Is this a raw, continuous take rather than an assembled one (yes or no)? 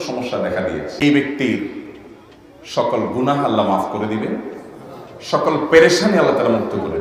no